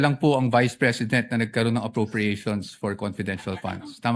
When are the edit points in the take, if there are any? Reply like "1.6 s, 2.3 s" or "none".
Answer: none

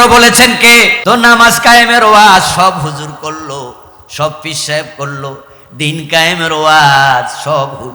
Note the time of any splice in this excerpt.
0.9 s

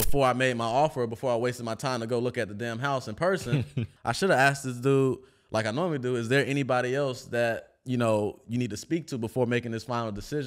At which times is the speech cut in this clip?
3.9 s

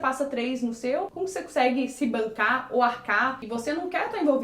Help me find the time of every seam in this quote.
3.4 s

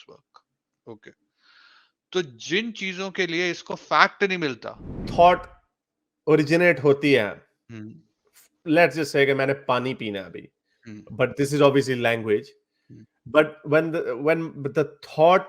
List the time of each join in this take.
5.0 s

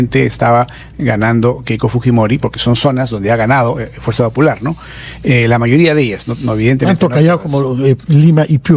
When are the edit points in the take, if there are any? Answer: none

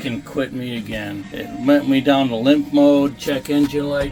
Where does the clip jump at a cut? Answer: 1.3 s

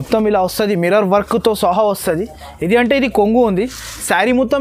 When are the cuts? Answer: none

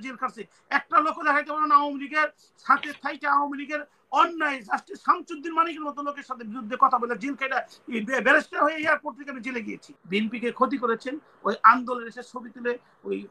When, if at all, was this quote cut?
9.9 s

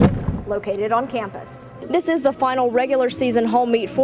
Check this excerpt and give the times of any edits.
1.7 s

